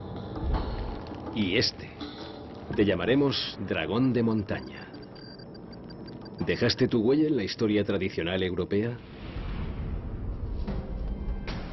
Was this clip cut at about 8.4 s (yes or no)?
no